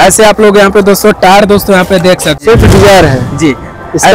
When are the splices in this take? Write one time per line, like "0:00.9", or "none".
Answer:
0:02.4